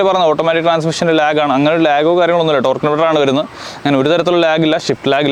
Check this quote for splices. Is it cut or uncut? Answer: uncut